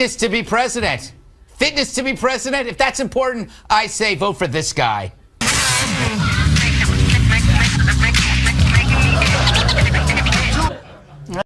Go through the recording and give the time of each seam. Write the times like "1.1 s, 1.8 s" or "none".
2.3 s